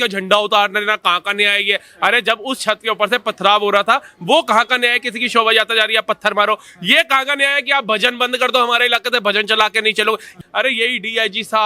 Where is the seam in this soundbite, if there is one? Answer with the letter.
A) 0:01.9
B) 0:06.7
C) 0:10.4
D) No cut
C